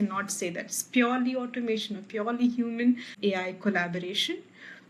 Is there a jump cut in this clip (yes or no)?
yes